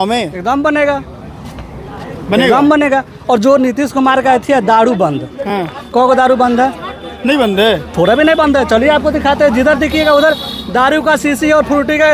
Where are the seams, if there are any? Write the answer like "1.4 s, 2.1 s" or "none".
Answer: none